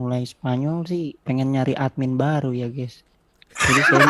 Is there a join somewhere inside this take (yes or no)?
yes